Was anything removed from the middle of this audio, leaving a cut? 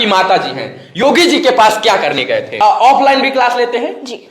yes; 1 cut; at 2.6 s

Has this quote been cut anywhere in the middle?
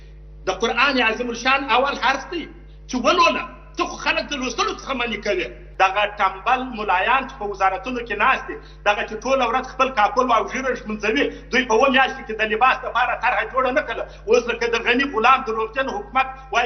yes; 1 cut; at 5.6 s

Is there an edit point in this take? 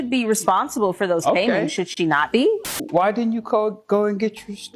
yes; 1 cut; at 2.7 s

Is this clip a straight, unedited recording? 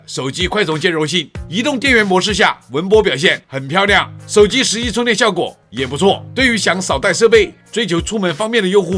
yes; 0 cuts

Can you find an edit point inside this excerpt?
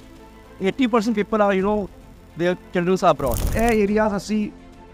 yes; 1 cut; at 3.5 s

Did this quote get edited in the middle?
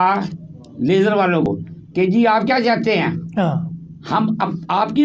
yes; 1 cut; at 1.5 s

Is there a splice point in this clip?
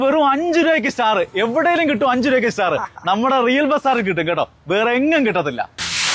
no; 0 cuts

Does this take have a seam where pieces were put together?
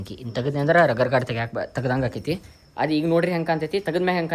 no; 0 cuts

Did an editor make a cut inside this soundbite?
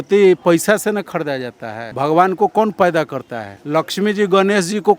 yes; 1 cut; at 1.8 s

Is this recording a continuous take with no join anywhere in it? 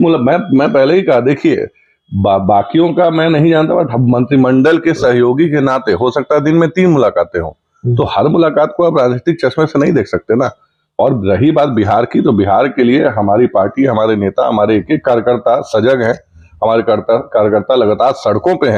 yes; 0 cuts

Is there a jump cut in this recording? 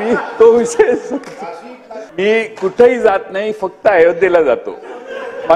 yes; 1 cut; at 2.0 s

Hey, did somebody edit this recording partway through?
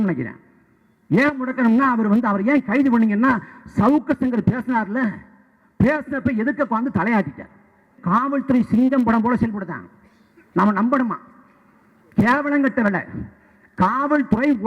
yes; 1 cut; at 7.9 s

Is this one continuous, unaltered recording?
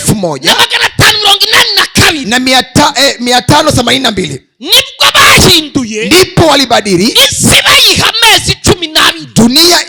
yes; 0 cuts

